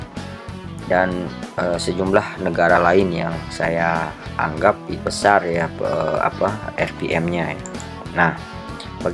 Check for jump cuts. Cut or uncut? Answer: cut